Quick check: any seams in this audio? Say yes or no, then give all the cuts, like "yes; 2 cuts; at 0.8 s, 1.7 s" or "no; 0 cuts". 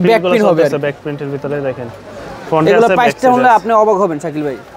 no; 0 cuts